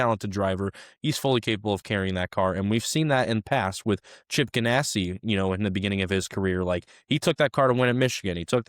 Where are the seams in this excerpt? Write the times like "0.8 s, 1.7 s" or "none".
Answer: none